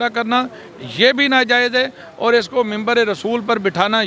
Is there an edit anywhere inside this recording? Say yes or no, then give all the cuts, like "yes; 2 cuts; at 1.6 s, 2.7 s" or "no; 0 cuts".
no; 0 cuts